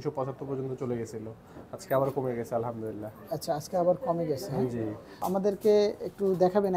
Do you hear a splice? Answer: yes; 1 cut; at 5.2 s

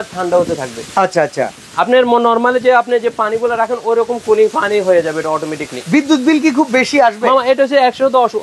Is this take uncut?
yes; 0 cuts

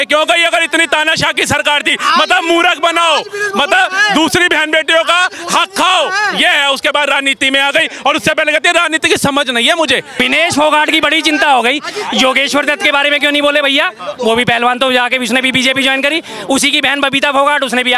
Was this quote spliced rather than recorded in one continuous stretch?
yes; 1 cut; at 10.2 s

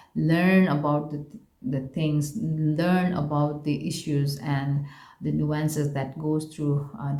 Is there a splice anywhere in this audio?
no; 0 cuts

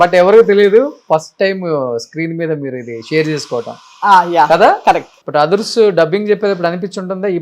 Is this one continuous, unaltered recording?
no; 1 cut; at 5.1 s

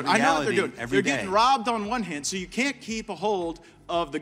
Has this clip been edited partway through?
no; 0 cuts

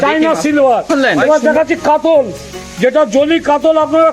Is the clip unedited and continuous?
no; 1 cut; at 0.9 s

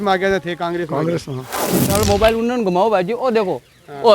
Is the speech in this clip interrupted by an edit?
yes; 1 cut; at 1.8 s

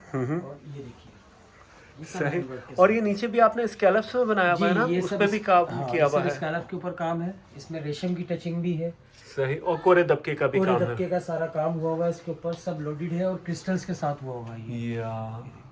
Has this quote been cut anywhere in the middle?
no; 0 cuts

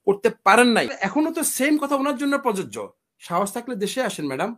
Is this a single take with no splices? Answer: no; 1 cut; at 1.0 s

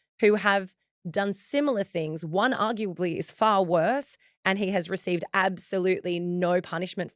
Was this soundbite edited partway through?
no; 0 cuts

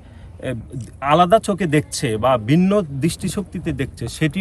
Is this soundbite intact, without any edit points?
yes; 0 cuts

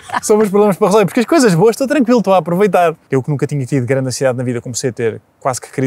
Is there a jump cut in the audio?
yes; 1 cut; at 3.0 s

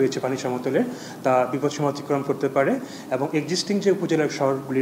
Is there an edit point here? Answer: no; 0 cuts

